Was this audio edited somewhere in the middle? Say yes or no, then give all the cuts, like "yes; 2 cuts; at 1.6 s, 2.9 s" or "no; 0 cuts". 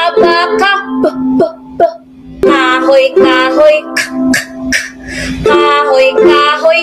yes; 1 cut; at 2.4 s